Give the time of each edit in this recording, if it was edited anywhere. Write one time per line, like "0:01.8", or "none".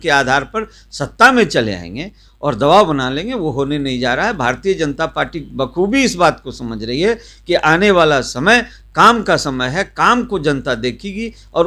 none